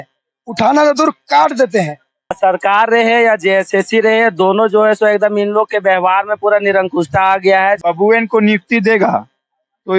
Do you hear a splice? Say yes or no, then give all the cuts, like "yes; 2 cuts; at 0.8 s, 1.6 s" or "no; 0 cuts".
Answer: yes; 2 cuts; at 2.4 s, 7.8 s